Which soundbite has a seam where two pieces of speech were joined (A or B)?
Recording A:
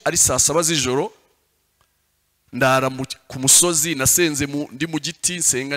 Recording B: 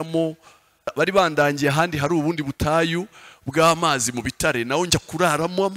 B